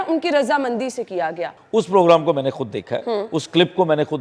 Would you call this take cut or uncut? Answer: cut